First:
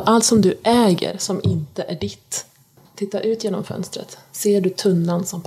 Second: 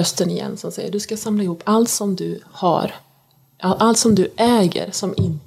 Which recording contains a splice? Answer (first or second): first